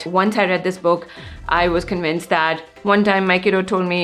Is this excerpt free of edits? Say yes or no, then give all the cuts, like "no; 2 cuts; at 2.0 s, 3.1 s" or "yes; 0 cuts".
no; 1 cut; at 2.7 s